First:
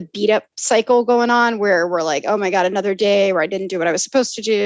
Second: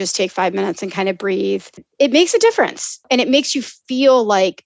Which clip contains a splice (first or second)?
second